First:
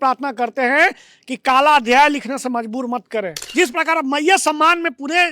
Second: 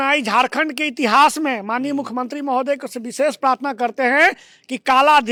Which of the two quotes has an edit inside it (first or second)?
first